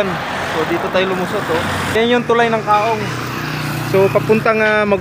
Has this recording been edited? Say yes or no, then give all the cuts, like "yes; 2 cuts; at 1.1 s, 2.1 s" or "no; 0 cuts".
yes; 1 cut; at 2.0 s